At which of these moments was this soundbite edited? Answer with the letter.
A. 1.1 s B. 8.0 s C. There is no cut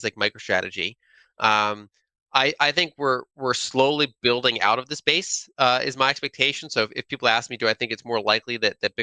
C